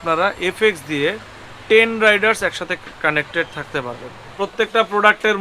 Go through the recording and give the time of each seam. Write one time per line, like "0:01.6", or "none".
0:04.3